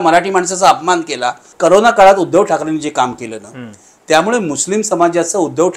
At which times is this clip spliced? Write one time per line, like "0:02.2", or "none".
0:01.5